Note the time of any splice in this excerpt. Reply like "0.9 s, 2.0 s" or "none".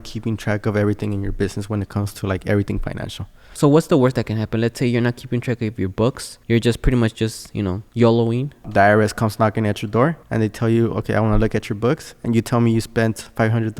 3.5 s, 6.3 s, 7.8 s, 8.7 s, 10.2 s

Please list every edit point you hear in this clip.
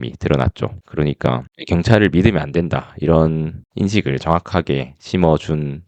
none

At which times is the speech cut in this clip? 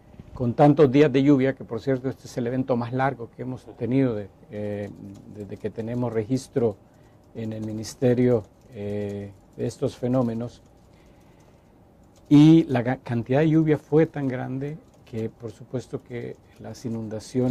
none

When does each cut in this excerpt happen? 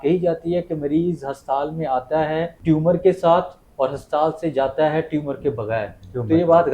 2.5 s

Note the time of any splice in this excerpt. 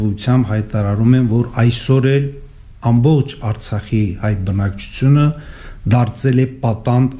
none

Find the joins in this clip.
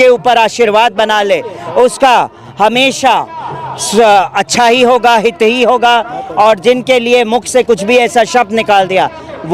none

